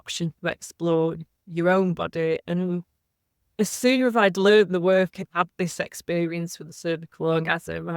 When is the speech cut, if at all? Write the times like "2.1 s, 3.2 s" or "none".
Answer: 2.4 s, 5.2 s